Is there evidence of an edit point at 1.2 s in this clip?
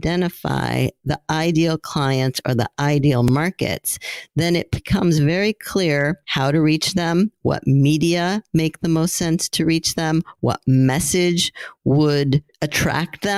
no; 0 cuts

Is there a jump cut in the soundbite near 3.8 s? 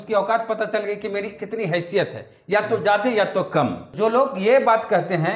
yes; 1 cut; at 3.8 s

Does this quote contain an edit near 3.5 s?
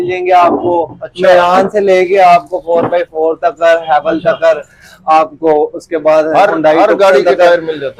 no; 0 cuts

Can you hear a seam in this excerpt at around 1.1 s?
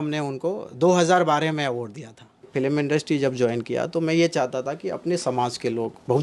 no; 1 cut; at 2.5 s

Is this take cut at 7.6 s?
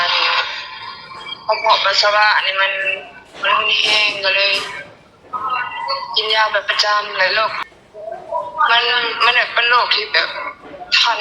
yes; 1 cut; at 7.6 s

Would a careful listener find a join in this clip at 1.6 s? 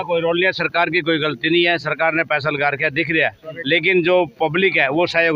no; 0 cuts

